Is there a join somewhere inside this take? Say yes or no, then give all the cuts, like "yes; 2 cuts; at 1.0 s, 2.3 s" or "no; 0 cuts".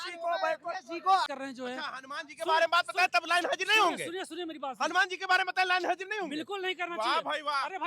yes; 1 cut; at 1.3 s